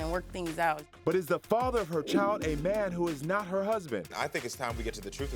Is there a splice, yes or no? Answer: no